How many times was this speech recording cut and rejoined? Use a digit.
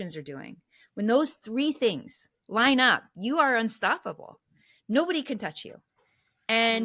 0